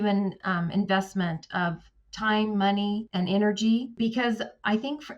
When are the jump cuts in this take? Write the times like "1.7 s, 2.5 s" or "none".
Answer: 3.1 s, 3.9 s